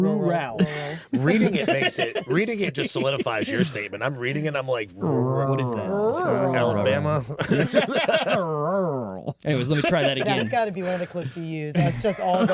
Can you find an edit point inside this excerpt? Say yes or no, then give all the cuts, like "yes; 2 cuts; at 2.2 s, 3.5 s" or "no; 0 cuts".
no; 0 cuts